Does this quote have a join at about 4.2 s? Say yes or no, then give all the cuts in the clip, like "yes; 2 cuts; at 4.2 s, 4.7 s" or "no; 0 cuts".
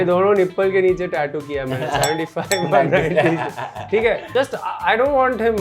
yes; 1 cut; at 4.2 s